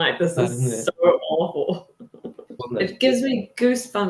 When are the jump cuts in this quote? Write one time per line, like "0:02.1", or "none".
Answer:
0:02.7